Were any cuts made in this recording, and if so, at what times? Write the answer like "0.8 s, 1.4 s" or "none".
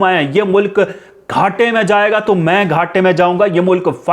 none

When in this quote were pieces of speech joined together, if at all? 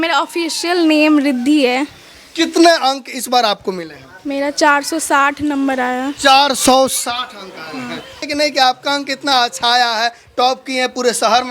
8.3 s

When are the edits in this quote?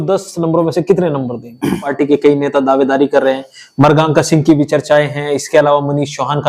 1.9 s

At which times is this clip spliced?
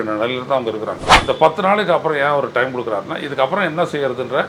1.1 s

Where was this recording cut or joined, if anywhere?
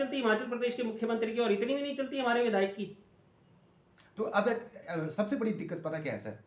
none

